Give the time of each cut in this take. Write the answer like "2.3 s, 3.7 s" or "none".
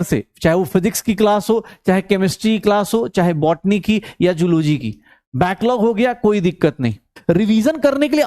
7.2 s